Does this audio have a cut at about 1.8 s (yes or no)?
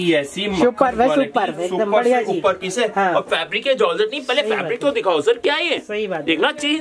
no